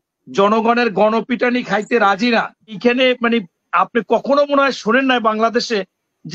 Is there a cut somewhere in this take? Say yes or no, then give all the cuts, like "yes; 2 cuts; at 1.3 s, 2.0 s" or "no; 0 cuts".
yes; 1 cut; at 2.8 s